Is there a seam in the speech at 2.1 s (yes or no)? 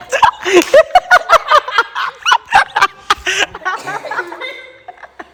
no